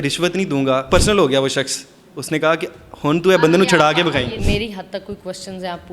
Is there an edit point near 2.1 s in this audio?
no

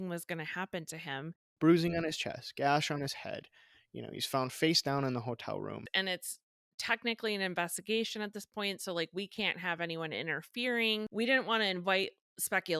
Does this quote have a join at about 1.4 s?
yes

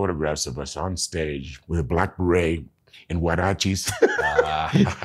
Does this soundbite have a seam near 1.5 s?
yes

